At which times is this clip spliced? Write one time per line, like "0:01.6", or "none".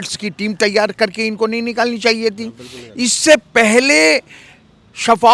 none